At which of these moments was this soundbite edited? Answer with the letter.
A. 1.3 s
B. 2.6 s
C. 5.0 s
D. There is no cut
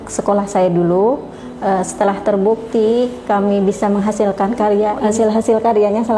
C